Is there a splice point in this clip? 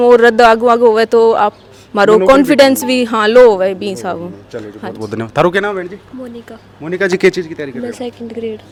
no; 0 cuts

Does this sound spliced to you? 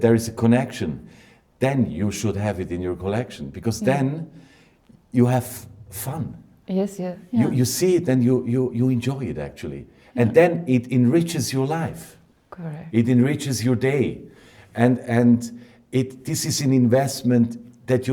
no; 0 cuts

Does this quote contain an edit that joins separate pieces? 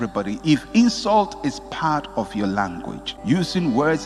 yes; 1 cut; at 3.0 s

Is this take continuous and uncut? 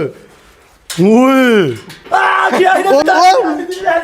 no; 2 cuts; at 2.0 s, 3.0 s

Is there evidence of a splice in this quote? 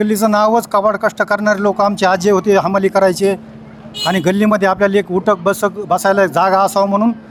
no; 0 cuts

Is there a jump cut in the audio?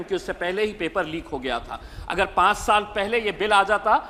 no; 0 cuts

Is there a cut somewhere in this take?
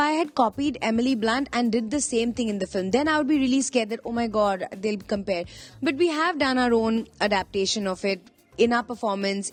no; 0 cuts

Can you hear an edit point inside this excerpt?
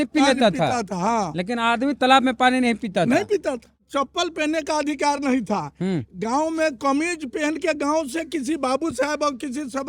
yes; 1 cut; at 3.9 s

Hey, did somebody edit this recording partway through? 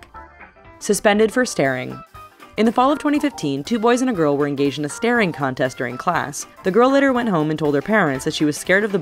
yes; 1 cut; at 2.5 s

